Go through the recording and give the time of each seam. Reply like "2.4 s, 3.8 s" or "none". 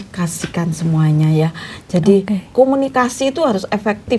none